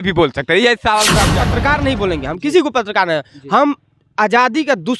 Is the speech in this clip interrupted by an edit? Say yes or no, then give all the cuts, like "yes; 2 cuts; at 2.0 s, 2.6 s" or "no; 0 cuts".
yes; 1 cut; at 1.4 s